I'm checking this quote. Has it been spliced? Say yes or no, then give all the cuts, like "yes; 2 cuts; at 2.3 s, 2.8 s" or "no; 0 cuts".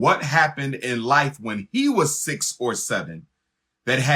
no; 0 cuts